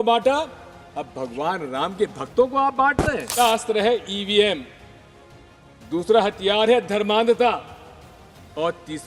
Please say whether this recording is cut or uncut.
cut